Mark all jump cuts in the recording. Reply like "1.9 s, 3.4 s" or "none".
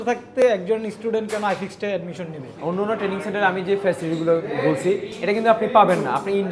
2.5 s